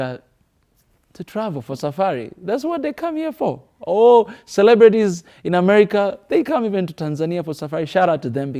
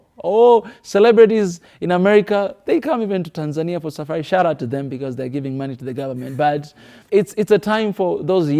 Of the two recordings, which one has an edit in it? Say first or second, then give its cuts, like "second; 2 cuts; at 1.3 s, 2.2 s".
second; 1 cut; at 7.0 s